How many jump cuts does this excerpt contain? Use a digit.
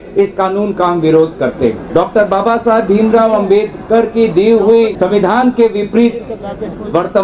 2